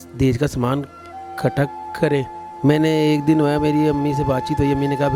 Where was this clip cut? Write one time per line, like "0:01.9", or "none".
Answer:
0:02.5